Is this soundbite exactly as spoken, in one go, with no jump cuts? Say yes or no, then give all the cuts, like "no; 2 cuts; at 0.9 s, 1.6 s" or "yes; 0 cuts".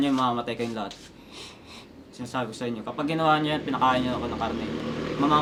yes; 0 cuts